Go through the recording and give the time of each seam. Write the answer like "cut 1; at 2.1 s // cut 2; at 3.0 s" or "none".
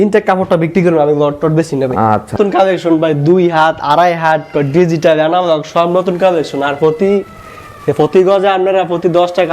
cut 1; at 2.3 s